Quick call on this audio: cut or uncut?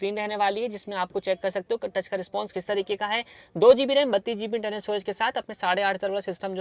uncut